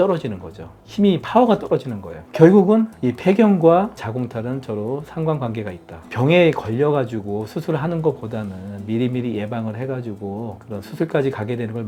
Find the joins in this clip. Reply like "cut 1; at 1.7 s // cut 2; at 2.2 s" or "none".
none